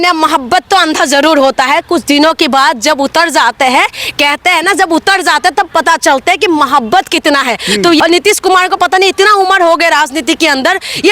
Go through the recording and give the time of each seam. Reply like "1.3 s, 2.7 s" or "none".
8.0 s